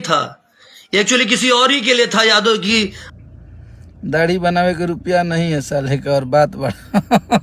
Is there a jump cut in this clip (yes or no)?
yes